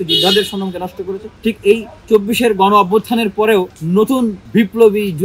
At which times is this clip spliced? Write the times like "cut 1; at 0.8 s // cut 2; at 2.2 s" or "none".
cut 1; at 1.2 s // cut 2; at 3.8 s // cut 3; at 4.4 s